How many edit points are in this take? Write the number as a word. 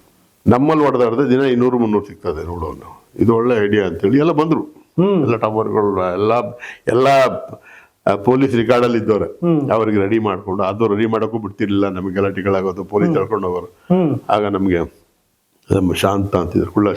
zero